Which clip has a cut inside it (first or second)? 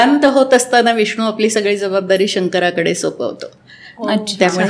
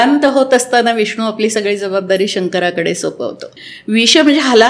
second